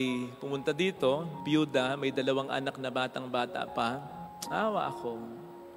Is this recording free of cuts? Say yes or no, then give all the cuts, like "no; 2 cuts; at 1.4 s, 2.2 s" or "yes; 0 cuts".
no; 1 cut; at 4.3 s